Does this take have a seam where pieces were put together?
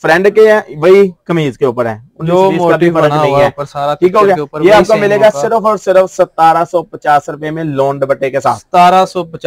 no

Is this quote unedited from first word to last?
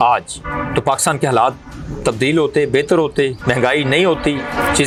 yes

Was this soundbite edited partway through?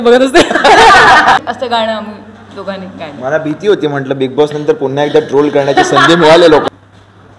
yes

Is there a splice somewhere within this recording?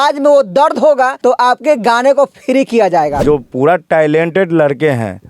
yes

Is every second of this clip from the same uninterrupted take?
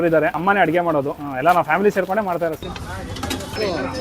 no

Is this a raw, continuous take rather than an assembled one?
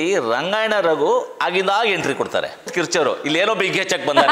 no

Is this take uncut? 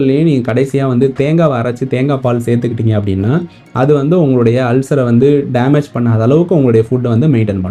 yes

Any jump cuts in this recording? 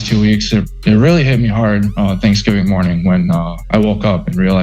no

